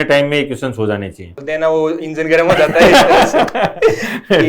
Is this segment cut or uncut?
cut